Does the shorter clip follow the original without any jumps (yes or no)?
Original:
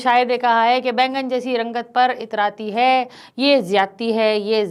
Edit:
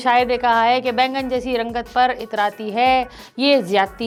yes